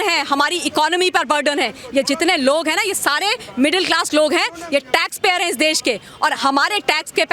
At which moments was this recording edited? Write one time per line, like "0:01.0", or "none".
none